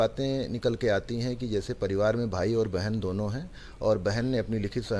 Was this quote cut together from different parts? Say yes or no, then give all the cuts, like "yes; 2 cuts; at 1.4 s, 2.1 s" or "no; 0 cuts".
no; 0 cuts